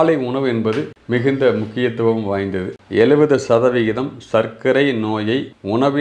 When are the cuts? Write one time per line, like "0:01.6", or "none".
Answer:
0:02.8